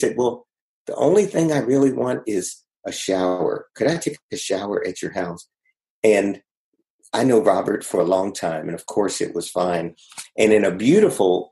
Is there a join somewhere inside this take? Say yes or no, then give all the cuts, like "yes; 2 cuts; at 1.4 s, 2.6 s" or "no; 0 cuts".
no; 0 cuts